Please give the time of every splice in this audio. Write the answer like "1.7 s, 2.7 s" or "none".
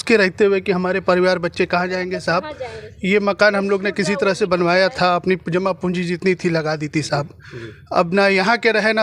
none